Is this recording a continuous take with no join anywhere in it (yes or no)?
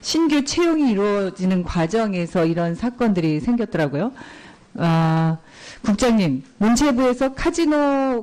yes